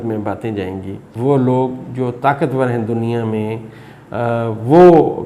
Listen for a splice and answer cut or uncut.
cut